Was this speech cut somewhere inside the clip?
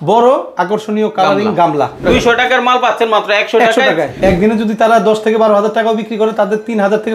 yes; 2 cuts; at 2.0 s, 4.1 s

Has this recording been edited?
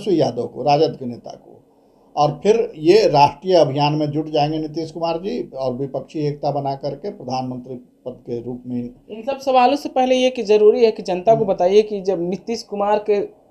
no; 0 cuts

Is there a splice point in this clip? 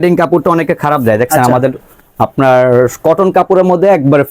no; 0 cuts

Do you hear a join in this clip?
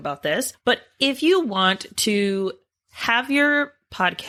no; 0 cuts

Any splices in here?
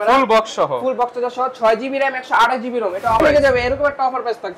yes; 1 cut; at 3.2 s

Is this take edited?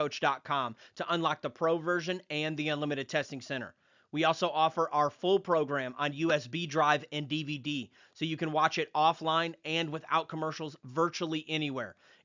no; 0 cuts

